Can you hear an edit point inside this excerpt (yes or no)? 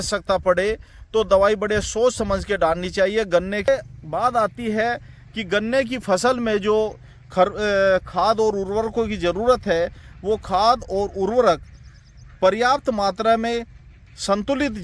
yes